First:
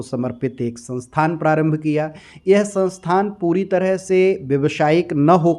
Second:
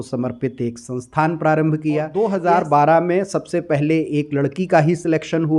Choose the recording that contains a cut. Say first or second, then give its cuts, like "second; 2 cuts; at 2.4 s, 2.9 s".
second; 1 cut; at 2.1 s